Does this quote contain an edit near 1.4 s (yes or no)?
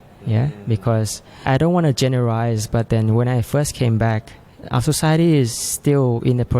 yes